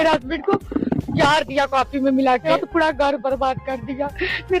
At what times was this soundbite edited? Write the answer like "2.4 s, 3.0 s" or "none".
2.5 s